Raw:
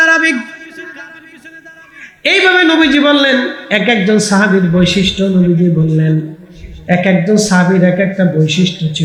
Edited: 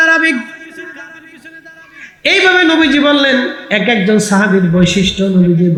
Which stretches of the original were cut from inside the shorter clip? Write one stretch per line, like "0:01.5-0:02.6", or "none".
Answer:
none